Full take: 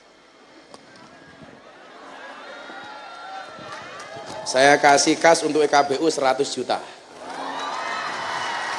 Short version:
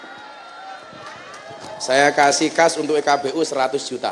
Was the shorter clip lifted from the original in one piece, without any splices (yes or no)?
yes